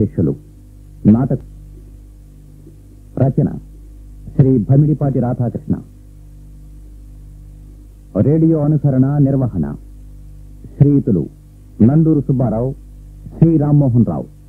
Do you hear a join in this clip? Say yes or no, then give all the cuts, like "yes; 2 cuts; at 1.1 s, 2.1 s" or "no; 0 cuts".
yes; 1 cut; at 1.4 s